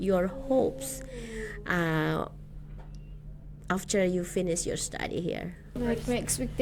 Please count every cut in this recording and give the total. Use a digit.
1